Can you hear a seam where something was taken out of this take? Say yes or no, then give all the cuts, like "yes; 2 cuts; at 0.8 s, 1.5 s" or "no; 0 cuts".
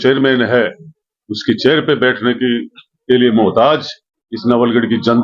no; 0 cuts